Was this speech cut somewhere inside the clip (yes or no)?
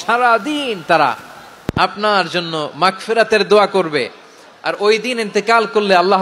no